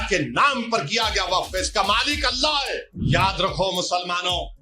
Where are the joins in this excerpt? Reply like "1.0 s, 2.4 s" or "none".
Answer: 2.9 s